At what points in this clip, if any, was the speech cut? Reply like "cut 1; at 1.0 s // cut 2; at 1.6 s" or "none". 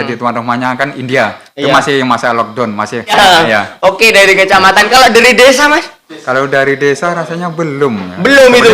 cut 1; at 3.1 s